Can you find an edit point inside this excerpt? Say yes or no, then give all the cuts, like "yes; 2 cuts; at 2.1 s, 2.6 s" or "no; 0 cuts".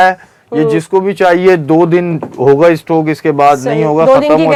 no; 0 cuts